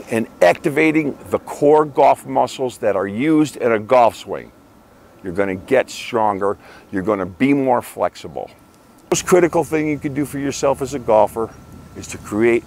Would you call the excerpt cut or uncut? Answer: cut